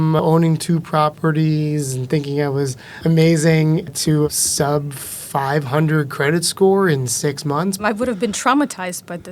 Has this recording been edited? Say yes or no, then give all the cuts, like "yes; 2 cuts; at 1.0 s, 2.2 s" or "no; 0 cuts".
yes; 3 cuts; at 2.9 s, 4.3 s, 7.8 s